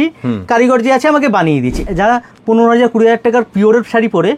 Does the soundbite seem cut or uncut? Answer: cut